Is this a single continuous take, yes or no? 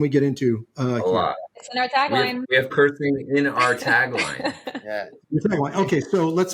yes